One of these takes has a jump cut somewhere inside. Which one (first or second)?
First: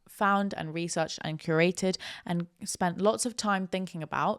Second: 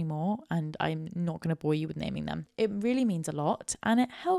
second